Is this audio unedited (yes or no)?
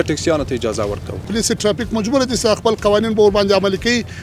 no